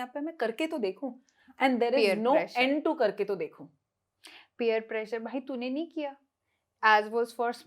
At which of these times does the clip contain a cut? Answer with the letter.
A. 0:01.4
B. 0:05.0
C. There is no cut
C